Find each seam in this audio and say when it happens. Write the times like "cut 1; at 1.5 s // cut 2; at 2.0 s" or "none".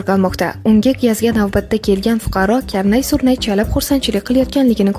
none